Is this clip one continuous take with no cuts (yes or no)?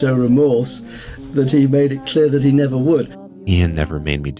no